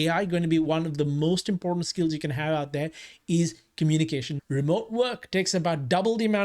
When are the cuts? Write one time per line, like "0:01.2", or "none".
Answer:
0:04.3